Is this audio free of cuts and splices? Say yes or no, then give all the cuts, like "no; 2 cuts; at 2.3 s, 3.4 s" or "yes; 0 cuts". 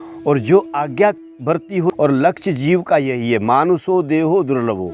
no; 1 cut; at 1.9 s